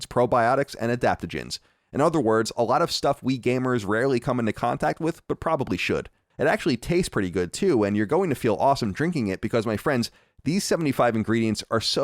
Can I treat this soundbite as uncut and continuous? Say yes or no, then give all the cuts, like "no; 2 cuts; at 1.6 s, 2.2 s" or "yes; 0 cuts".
no; 1 cut; at 6.2 s